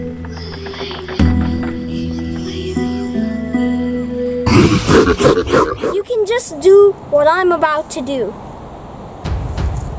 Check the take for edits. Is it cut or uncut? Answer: cut